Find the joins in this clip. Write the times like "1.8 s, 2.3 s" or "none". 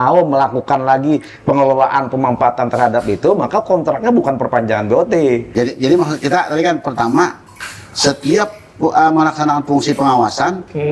5.5 s